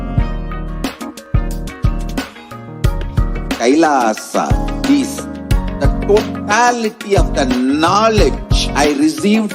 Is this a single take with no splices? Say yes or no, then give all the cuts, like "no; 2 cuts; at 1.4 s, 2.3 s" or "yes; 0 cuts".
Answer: yes; 0 cuts